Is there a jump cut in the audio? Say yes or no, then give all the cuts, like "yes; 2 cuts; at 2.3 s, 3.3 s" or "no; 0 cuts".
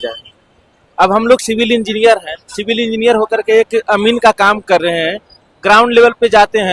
no; 0 cuts